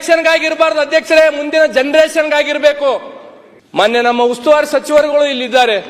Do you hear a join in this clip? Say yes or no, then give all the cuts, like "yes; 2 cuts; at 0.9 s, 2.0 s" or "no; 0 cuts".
no; 0 cuts